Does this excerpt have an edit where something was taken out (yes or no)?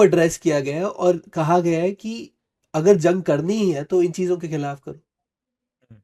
no